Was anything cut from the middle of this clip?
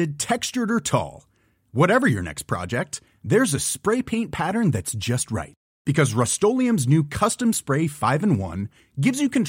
no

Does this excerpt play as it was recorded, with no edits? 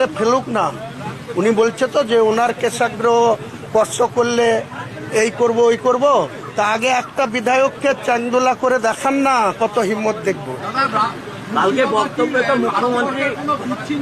yes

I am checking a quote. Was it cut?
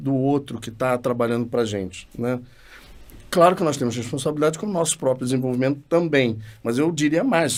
no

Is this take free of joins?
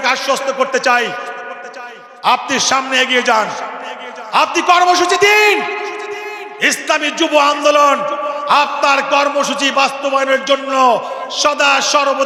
yes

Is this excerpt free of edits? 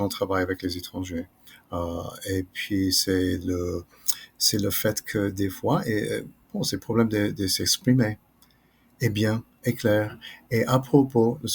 yes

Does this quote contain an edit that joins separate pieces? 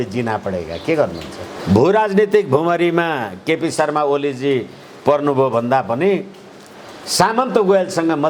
yes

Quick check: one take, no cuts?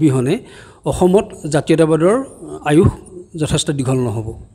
yes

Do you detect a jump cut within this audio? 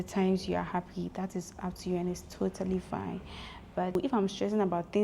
yes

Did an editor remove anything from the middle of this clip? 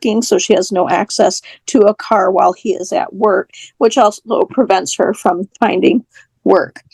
no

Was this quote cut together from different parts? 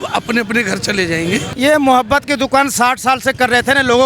yes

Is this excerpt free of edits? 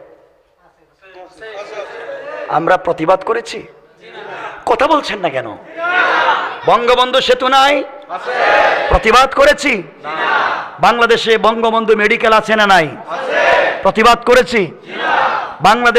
yes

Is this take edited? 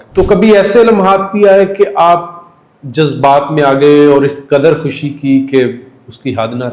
no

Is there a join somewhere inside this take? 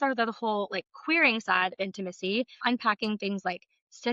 yes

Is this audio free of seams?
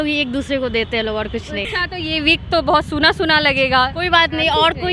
no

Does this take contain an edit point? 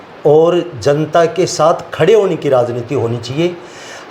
no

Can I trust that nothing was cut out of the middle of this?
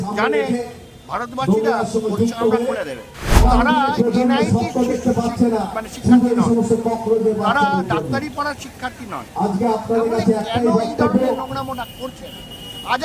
no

